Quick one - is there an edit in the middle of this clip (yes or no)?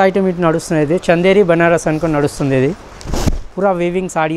no